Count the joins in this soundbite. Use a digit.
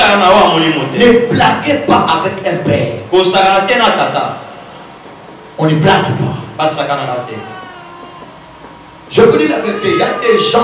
0